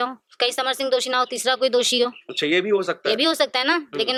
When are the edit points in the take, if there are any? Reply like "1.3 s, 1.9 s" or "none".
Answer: none

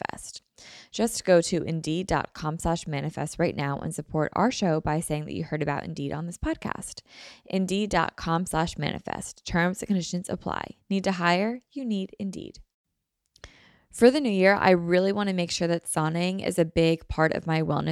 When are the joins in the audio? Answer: 12.6 s

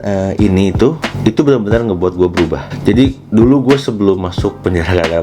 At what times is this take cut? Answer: 2.7 s

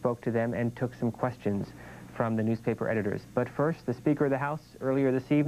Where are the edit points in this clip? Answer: 3.8 s

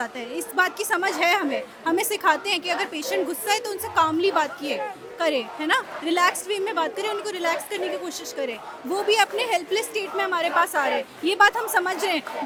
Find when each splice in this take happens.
none

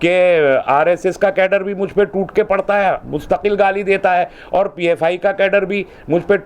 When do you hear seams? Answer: none

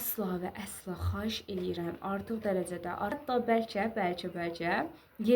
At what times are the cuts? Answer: 3.2 s

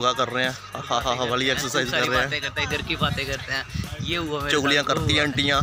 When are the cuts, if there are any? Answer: none

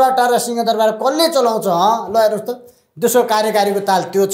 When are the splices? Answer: none

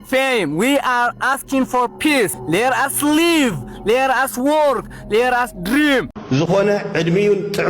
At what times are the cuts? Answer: 6.1 s

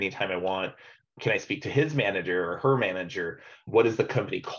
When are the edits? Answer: 1.1 s, 3.6 s

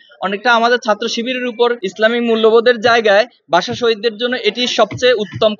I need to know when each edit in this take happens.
1.8 s

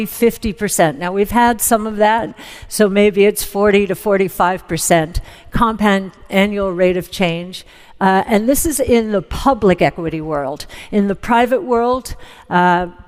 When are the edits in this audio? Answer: none

